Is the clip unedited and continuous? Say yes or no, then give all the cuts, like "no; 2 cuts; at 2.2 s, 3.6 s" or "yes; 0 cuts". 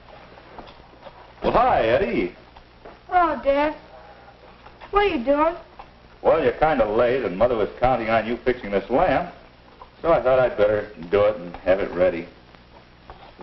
yes; 0 cuts